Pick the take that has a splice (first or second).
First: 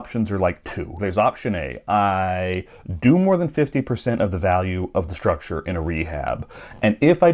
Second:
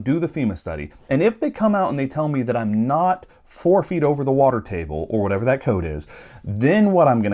first